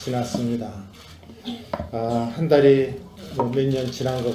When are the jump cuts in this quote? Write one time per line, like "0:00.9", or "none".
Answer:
none